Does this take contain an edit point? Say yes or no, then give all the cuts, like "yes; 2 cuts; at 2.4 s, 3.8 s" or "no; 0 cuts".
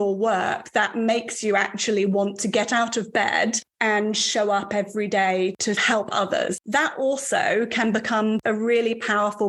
yes; 3 cuts; at 5.6 s, 6.6 s, 8.4 s